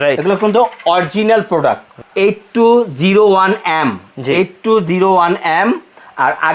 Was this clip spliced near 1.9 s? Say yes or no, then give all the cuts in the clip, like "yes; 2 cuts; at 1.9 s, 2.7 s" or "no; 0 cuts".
yes; 1 cut; at 1.9 s